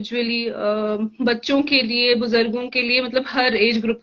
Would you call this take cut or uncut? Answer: uncut